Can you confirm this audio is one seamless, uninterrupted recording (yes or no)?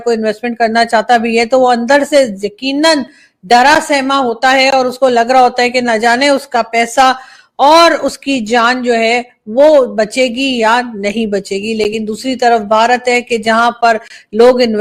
yes